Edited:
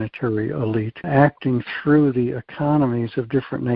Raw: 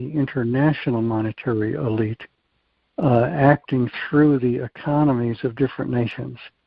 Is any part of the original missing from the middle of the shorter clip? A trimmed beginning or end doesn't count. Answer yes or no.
yes